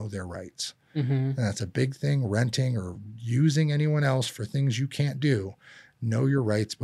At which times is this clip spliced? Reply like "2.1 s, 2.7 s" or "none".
none